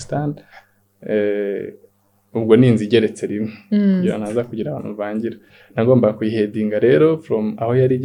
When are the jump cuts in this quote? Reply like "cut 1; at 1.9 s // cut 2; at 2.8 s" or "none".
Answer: none

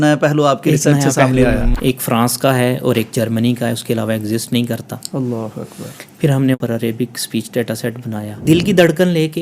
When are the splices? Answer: cut 1; at 1.7 s // cut 2; at 6.6 s // cut 3; at 8.4 s

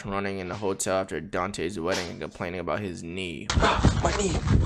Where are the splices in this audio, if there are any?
cut 1; at 3.5 s

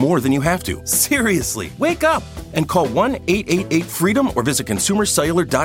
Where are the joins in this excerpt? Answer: cut 1; at 1.2 s

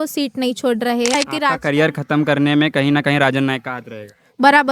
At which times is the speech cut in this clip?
cut 1; at 1.2 s

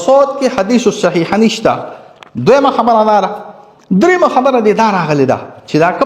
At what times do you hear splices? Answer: none

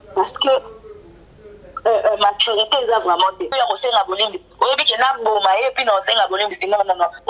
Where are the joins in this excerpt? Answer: cut 1; at 3.5 s

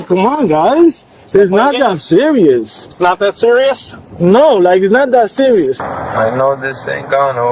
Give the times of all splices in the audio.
cut 1; at 1.1 s // cut 2; at 5.9 s

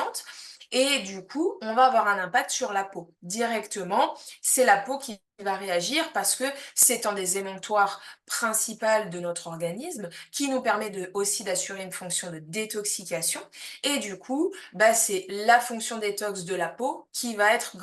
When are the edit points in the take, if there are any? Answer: none

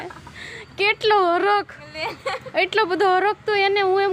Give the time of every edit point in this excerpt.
none

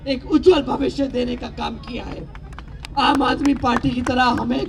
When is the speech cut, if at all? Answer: none

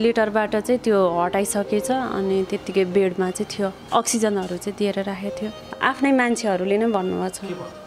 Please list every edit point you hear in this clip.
cut 1; at 5.8 s

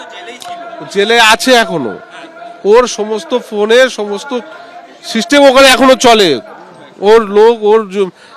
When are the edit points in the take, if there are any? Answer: none

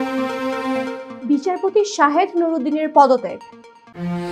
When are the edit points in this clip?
none

